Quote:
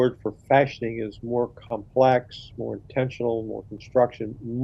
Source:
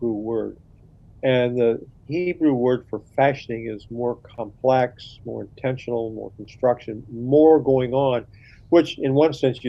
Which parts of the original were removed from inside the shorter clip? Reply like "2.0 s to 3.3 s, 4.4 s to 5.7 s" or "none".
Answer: none